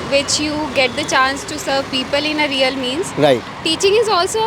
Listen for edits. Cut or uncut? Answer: uncut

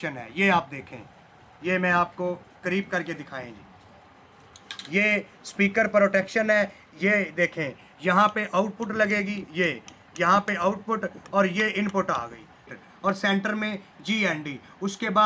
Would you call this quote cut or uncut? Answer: cut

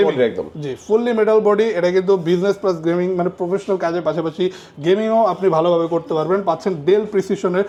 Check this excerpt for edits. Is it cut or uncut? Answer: uncut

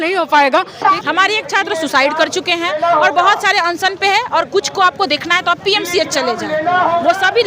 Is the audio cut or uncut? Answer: cut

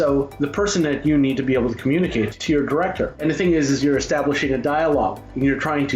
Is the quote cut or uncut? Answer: cut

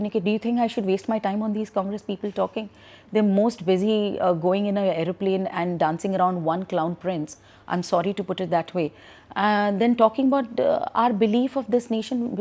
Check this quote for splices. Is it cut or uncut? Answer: uncut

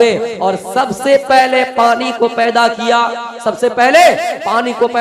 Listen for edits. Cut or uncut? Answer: uncut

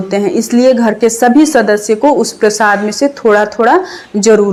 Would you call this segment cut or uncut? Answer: uncut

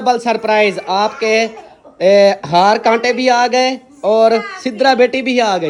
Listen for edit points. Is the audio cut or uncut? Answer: uncut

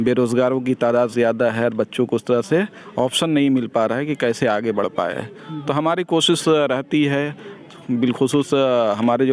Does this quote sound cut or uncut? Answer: uncut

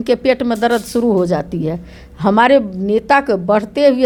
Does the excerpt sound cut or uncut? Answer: uncut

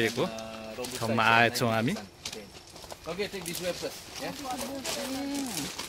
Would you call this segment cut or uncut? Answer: uncut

